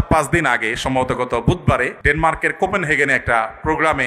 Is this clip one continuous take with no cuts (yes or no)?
no